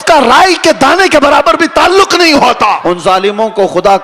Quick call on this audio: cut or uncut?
cut